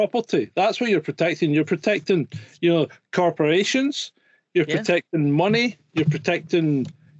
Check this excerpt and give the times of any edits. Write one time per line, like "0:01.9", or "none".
none